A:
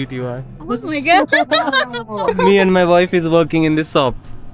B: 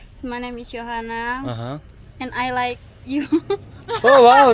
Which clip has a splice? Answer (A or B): A